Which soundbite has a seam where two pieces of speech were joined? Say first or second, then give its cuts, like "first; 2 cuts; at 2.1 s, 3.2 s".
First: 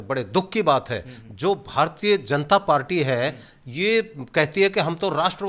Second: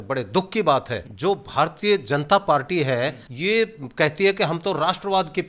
second; 2 cuts; at 1.0 s, 3.3 s